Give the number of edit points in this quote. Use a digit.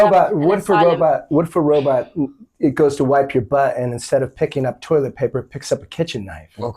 0